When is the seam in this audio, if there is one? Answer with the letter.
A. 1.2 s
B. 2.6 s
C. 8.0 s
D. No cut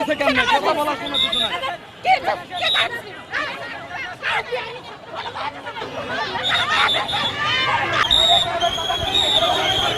C